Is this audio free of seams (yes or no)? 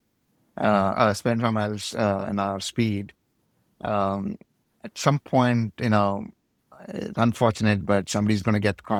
yes